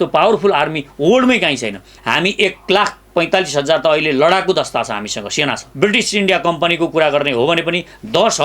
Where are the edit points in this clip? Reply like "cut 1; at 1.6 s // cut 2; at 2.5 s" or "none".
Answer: cut 1; at 1.9 s // cut 2; at 5.7 s